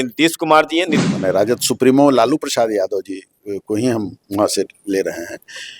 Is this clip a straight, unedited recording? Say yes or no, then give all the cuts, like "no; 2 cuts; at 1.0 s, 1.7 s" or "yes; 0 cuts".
no; 1 cut; at 1.0 s